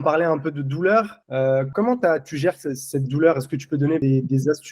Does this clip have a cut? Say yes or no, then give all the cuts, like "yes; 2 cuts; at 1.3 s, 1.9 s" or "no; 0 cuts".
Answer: yes; 2 cuts; at 1.6 s, 4.0 s